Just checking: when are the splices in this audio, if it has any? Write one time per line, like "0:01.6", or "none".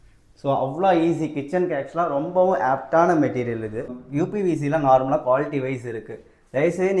0:04.0